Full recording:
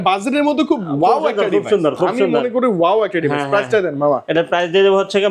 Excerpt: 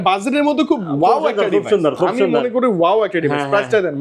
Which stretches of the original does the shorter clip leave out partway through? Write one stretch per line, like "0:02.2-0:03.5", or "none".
none